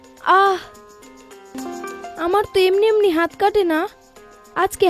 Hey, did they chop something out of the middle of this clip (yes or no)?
yes